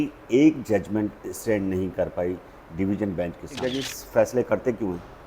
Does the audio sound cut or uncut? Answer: cut